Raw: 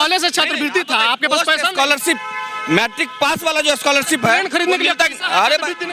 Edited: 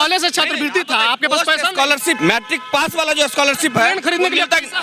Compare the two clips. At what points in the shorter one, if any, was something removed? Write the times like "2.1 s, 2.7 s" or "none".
2.2 s

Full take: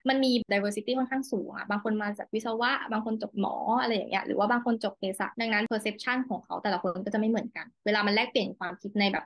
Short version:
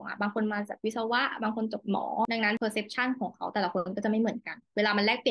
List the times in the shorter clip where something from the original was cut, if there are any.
2.2 s

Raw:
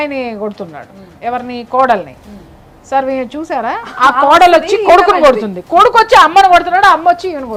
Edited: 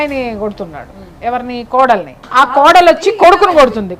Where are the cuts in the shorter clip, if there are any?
2.2 s

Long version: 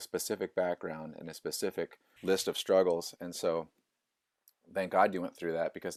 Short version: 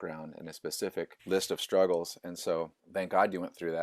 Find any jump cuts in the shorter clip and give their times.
1.2 s, 2.8 s

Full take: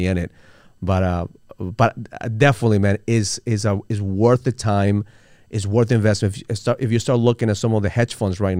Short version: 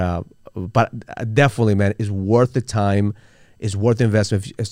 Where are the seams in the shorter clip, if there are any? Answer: 2.0 s

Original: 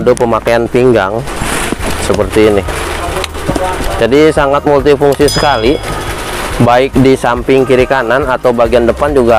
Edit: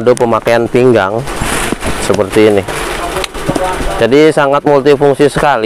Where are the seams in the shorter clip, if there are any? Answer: none

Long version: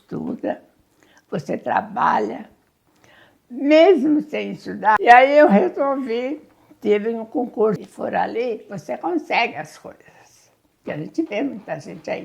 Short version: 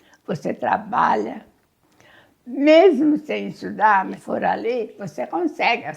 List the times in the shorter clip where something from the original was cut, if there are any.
4.0 s

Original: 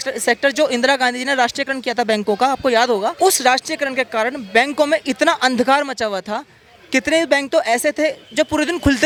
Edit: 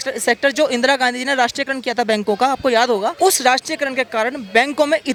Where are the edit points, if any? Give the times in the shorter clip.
none

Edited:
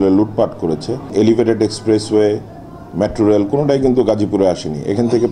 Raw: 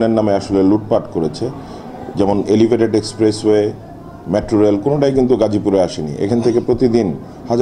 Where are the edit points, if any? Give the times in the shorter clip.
1.1 s

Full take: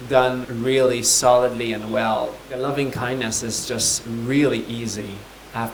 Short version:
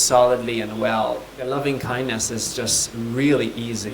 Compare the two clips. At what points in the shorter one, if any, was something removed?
none

